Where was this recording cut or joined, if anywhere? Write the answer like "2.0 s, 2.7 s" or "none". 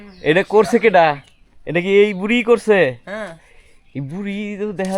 none